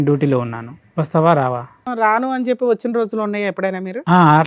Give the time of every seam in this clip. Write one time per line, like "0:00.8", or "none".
0:01.9